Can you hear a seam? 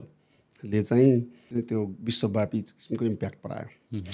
yes; 1 cut; at 1.4 s

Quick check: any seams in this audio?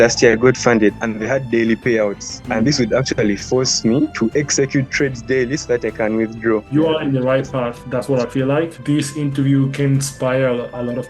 yes; 3 cuts; at 0.9 s, 6.7 s, 8.7 s

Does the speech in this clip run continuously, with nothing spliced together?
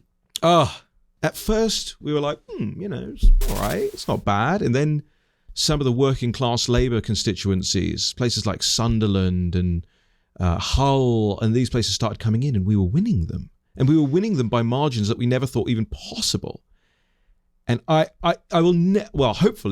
no; 1 cut; at 1.1 s

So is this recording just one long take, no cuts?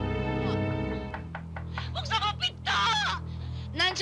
no; 1 cut; at 1.1 s

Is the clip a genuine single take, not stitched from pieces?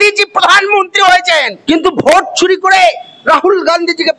no; 1 cut; at 1.5 s

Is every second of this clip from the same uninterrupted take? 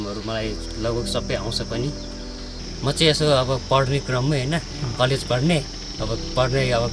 yes; 0 cuts

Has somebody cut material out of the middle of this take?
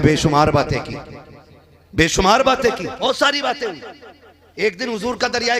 yes; 1 cut; at 3.0 s

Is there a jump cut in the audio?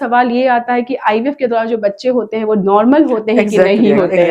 no; 0 cuts

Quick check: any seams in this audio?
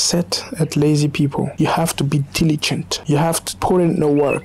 no; 0 cuts

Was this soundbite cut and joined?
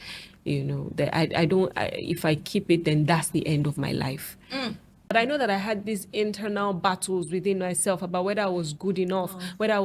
yes; 1 cut; at 4.9 s

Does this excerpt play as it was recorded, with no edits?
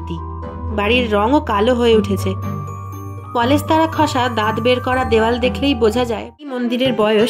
no; 1 cut; at 6.2 s

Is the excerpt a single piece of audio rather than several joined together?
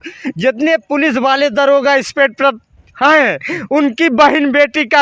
yes; 0 cuts

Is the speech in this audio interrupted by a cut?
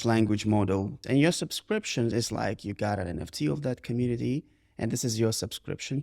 yes; 1 cut; at 1.0 s

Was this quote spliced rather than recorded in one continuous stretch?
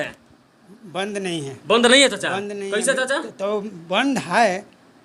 no; 0 cuts

